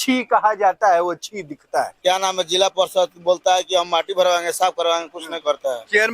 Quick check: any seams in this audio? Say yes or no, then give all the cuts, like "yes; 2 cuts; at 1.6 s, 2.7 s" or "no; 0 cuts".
yes; 1 cut; at 1.9 s